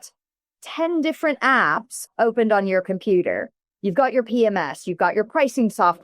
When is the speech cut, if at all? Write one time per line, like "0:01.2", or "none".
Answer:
0:02.0